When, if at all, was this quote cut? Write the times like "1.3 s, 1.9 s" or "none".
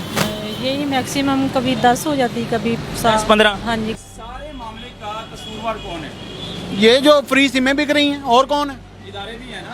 3.9 s